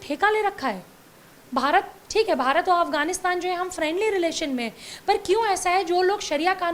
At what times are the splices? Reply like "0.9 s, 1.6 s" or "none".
none